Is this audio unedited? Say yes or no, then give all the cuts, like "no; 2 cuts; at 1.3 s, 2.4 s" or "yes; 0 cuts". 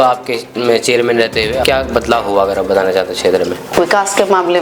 no; 2 cuts; at 1.6 s, 3.7 s